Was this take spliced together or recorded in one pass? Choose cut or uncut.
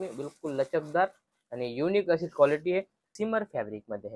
cut